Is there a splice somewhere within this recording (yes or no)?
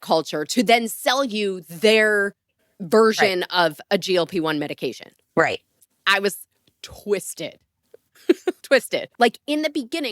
yes